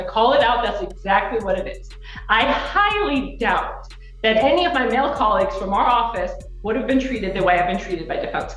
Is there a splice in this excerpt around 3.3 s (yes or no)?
no